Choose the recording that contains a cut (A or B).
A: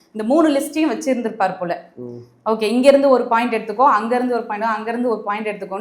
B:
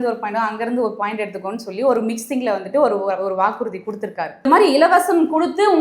B